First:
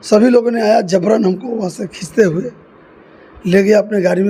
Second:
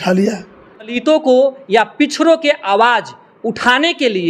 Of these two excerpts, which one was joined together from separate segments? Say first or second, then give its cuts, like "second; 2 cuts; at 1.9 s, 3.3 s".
second; 1 cut; at 0.9 s